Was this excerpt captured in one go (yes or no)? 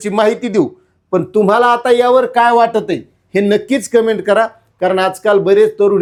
yes